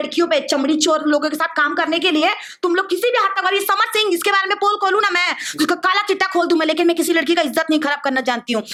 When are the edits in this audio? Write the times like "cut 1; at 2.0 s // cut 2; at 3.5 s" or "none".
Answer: none